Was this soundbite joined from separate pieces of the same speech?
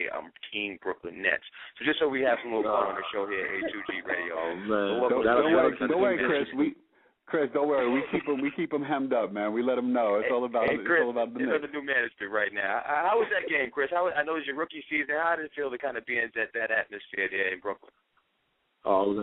no; 0 cuts

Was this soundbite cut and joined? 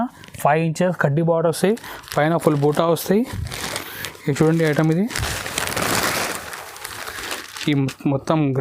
no; 0 cuts

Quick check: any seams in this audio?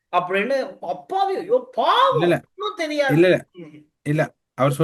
no; 0 cuts

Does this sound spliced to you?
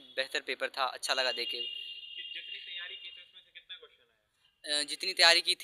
no; 0 cuts

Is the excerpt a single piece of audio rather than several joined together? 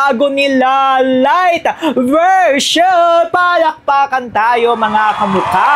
yes; 0 cuts

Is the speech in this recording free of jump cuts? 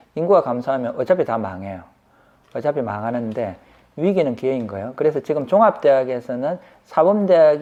yes; 0 cuts

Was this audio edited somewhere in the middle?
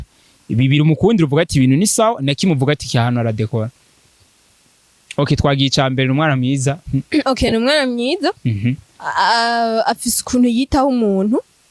no; 0 cuts

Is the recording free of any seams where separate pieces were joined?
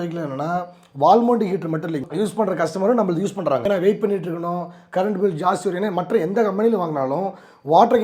no; 2 cuts; at 2.1 s, 3.6 s

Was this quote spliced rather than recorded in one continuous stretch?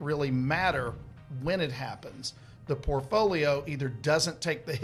no; 0 cuts

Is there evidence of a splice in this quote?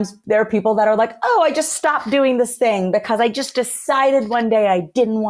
no; 0 cuts

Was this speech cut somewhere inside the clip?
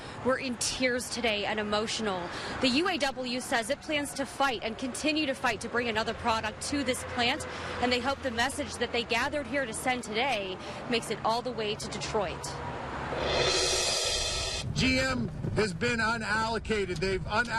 no; 0 cuts

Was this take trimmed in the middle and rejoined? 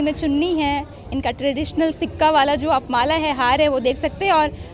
no; 0 cuts

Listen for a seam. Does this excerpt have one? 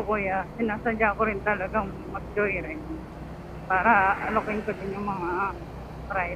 no; 0 cuts

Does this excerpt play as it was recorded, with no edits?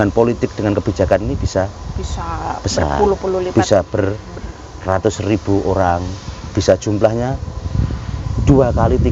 yes; 0 cuts

